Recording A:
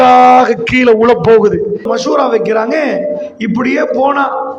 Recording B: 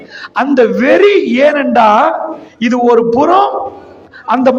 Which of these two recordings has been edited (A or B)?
A